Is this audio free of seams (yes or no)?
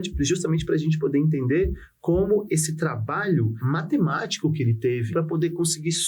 no